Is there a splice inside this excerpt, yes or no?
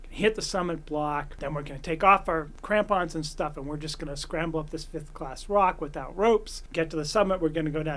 yes